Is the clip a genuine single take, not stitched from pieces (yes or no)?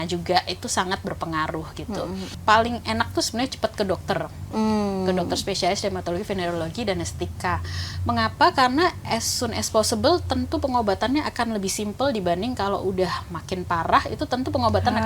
no